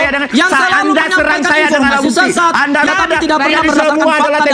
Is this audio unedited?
no; 1 cut; at 2.9 s

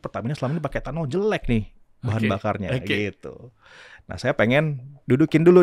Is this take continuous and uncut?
yes; 0 cuts

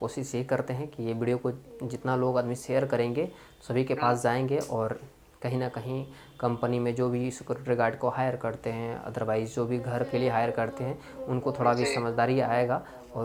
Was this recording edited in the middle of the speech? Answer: no; 0 cuts

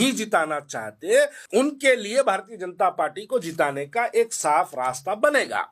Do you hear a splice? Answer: yes; 1 cut; at 1.4 s

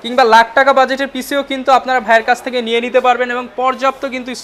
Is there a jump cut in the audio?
no; 0 cuts

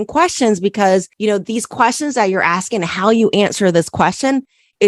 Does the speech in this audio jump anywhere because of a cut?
no; 0 cuts

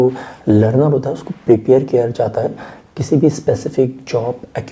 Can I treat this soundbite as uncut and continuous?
yes; 0 cuts

